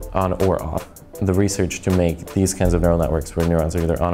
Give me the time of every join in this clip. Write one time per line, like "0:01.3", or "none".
0:01.0